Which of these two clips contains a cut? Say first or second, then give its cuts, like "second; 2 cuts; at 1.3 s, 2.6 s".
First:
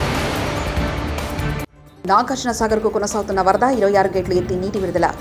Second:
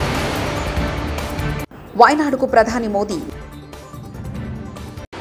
first; 1 cut; at 1.7 s